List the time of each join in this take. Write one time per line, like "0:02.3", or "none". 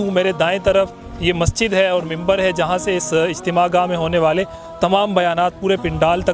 none

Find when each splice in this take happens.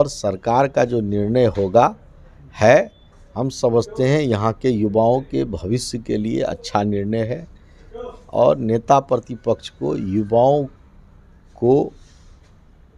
none

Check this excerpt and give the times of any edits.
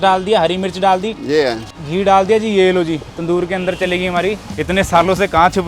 0:01.7
0:04.5

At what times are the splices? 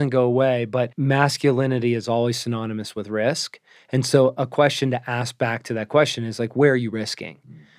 0:00.9

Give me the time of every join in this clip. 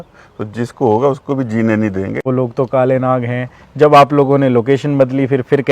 0:02.2

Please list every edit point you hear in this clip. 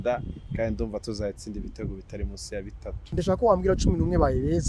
0:03.1

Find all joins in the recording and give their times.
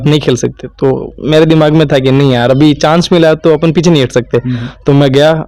none

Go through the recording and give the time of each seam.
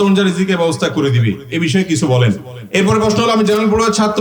0:02.5

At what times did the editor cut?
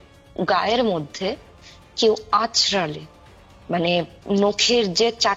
none

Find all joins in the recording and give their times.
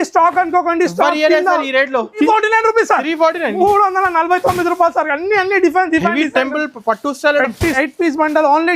0:02.3
0:07.8

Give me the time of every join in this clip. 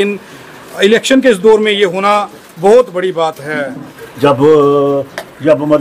0:03.9

